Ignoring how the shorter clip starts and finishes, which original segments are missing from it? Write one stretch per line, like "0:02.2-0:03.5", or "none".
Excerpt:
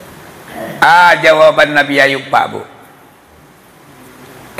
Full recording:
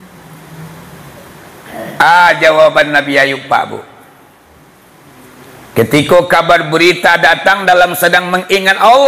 none